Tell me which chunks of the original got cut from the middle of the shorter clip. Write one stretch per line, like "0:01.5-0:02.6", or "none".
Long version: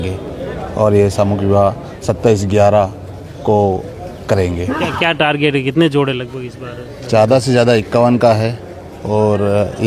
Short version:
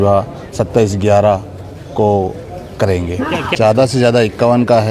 0:05.0-0:07.0